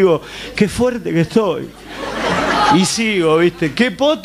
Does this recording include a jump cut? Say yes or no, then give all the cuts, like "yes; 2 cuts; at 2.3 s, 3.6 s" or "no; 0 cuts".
yes; 1 cut; at 3.3 s